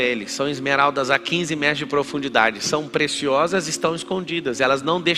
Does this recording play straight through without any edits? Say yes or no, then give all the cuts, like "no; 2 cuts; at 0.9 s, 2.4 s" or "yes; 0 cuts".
yes; 0 cuts